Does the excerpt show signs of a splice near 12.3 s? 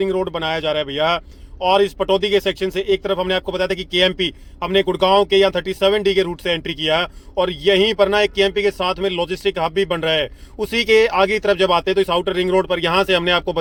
no; 0 cuts

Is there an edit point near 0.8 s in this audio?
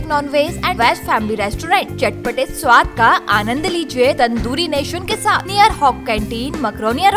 yes; 3 cuts; at 0.8 s, 4.2 s, 5.4 s

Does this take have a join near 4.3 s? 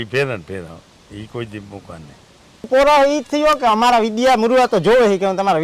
no; 1 cut; at 2.7 s

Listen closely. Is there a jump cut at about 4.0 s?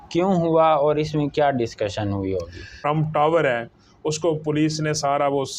no; 1 cut; at 2.8 s

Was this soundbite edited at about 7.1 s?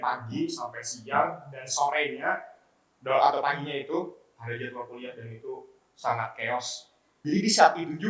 yes; 1 cut; at 7.1 s

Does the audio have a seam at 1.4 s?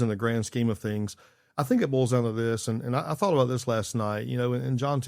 no; 0 cuts

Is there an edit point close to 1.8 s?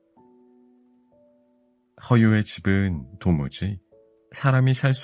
yes; 1 cut; at 1.8 s

